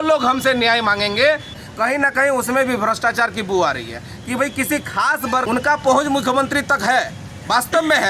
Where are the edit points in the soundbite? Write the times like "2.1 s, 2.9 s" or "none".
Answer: 1.5 s, 5.4 s